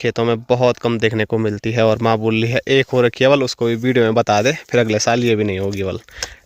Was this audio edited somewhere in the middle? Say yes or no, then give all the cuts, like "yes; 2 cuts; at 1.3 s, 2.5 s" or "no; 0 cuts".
no; 0 cuts